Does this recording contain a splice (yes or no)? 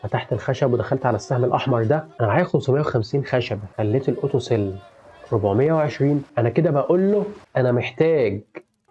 yes